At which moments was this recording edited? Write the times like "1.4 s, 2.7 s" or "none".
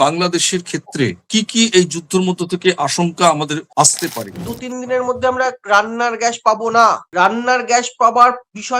1.3 s, 4.0 s